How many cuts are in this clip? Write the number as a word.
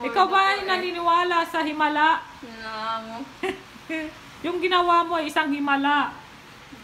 zero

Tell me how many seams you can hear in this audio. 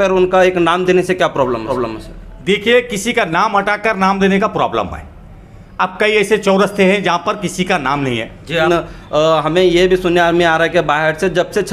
zero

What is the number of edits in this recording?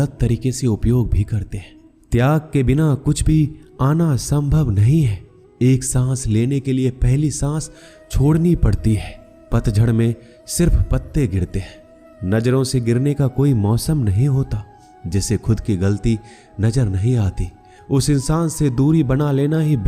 zero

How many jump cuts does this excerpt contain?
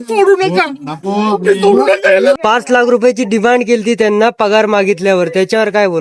one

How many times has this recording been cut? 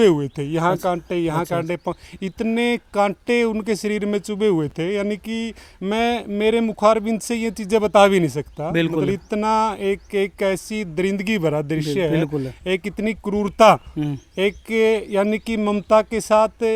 zero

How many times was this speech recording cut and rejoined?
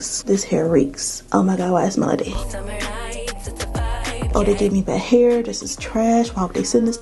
two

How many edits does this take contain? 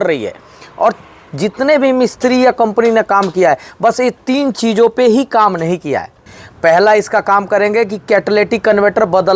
zero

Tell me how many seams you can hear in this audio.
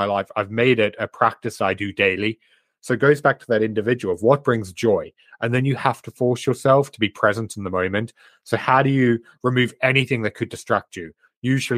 zero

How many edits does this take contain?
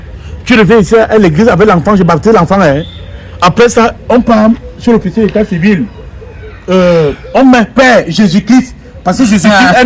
zero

